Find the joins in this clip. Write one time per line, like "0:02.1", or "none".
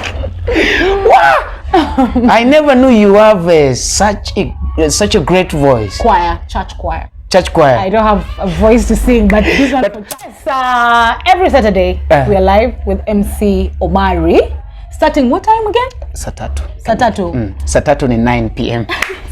0:10.4